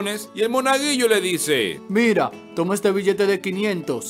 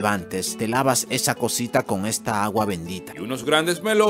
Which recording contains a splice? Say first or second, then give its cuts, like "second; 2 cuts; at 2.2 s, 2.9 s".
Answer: second; 1 cut; at 3.1 s